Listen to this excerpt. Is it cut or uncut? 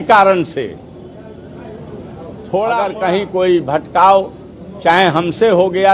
cut